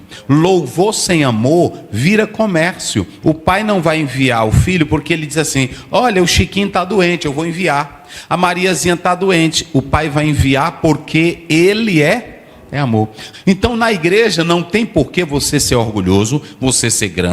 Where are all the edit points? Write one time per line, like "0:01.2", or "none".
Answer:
0:03.1
0:13.2